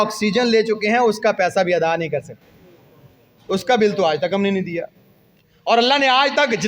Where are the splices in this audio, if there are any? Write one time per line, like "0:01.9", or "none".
none

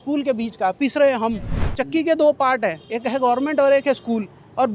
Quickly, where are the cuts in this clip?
none

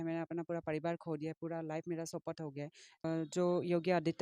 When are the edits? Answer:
0:03.0

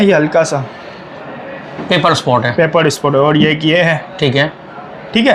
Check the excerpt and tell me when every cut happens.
none

